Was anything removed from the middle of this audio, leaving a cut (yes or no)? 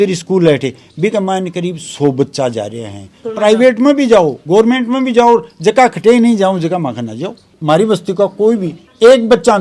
yes